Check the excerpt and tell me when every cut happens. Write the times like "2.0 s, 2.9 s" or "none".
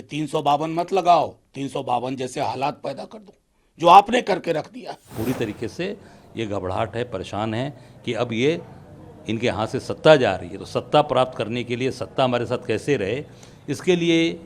5.1 s